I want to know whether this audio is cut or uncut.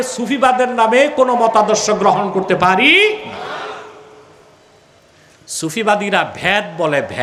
uncut